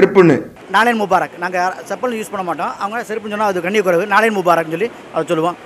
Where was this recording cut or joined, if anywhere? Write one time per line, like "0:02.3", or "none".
none